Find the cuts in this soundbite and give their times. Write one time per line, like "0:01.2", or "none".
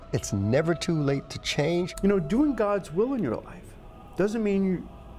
0:01.9